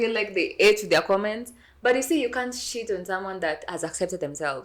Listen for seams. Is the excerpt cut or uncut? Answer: uncut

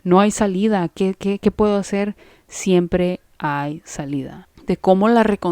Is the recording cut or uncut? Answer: cut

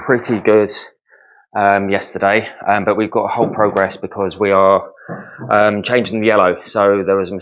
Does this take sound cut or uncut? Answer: uncut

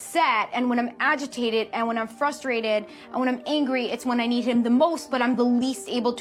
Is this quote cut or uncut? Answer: uncut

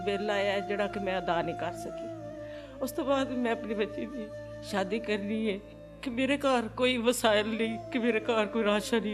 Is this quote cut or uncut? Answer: uncut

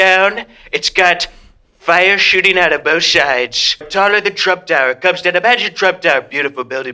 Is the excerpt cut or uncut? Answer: cut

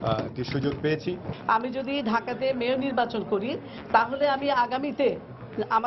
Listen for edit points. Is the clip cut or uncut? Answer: cut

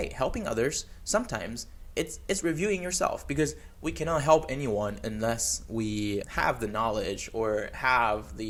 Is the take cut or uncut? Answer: uncut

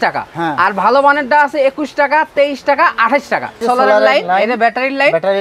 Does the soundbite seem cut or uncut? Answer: cut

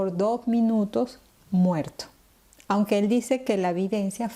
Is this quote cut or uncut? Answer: uncut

